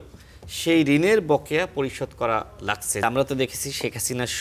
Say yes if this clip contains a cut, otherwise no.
yes